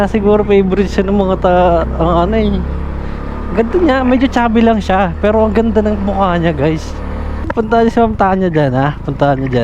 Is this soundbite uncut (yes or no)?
yes